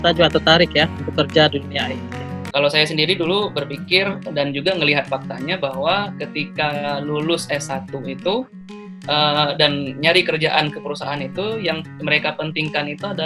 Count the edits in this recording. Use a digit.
1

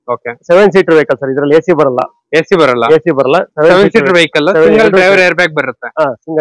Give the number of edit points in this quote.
0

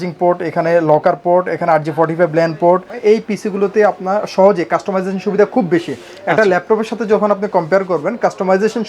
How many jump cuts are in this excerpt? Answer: 1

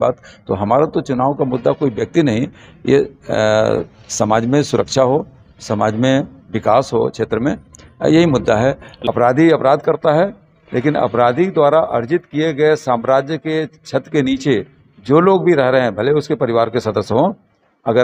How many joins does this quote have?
1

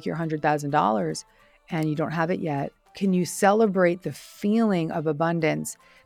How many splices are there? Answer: 1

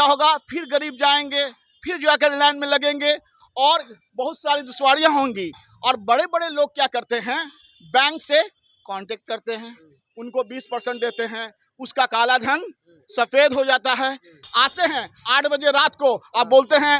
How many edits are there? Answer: 1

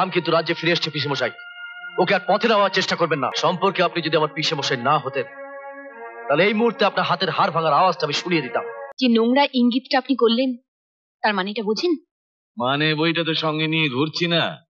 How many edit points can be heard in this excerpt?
2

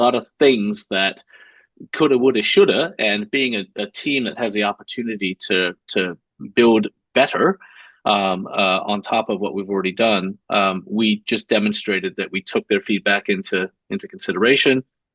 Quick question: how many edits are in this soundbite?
0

